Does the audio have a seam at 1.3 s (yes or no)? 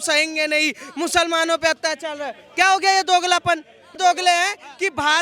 no